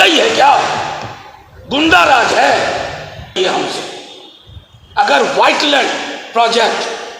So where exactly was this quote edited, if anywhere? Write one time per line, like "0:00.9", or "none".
0:03.4